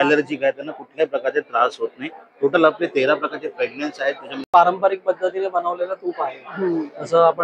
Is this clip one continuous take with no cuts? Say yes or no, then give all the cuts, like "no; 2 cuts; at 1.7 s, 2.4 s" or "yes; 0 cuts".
no; 1 cut; at 4.5 s